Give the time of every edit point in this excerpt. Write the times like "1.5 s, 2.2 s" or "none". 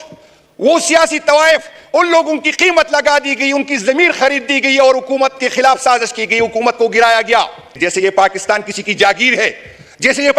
7.7 s